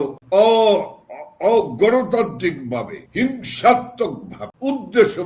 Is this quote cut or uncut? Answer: uncut